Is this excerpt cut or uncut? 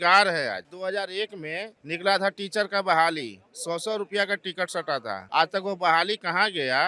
uncut